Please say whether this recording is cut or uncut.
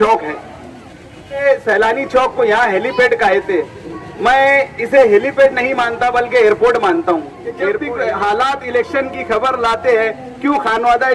cut